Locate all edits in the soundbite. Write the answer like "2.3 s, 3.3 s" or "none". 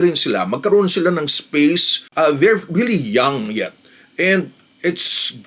2.0 s